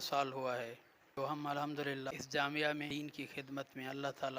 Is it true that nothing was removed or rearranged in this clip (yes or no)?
no